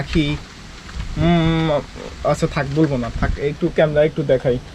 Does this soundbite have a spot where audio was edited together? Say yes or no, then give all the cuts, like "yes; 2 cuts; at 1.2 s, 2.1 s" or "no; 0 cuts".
no; 0 cuts